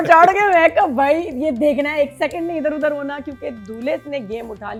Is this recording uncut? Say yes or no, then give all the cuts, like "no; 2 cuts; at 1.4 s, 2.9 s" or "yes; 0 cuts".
yes; 0 cuts